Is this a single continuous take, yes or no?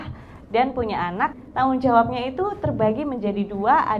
no